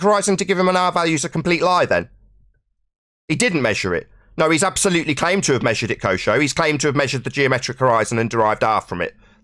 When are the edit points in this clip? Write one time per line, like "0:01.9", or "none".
none